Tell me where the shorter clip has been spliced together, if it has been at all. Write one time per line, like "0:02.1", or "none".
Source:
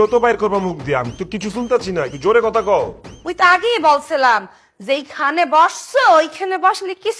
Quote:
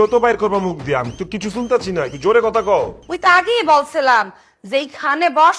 0:03.0